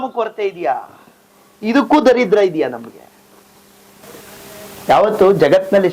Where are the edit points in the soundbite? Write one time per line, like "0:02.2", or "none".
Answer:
0:04.0

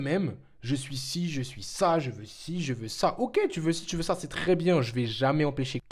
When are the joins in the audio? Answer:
none

